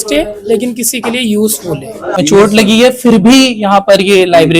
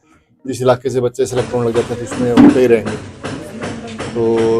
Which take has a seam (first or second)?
first